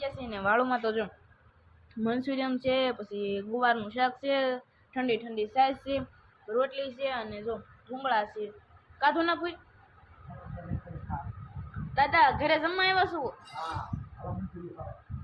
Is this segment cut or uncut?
uncut